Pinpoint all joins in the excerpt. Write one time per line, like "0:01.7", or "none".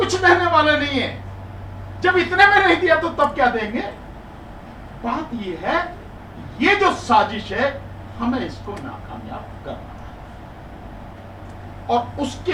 none